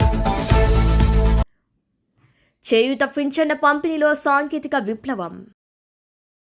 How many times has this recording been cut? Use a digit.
1